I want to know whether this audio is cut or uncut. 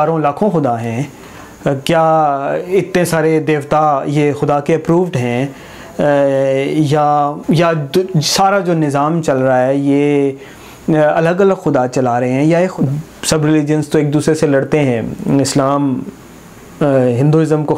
cut